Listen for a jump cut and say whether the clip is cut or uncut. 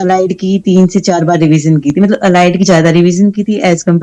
uncut